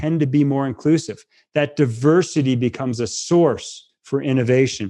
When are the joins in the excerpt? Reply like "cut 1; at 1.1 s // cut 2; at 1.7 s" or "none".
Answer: none